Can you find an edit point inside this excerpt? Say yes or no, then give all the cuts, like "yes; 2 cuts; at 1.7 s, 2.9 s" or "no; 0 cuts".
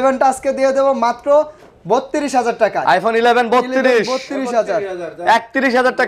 no; 0 cuts